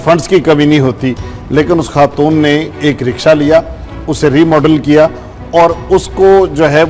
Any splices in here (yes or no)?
yes